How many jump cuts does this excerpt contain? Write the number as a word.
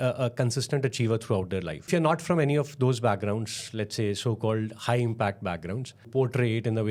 two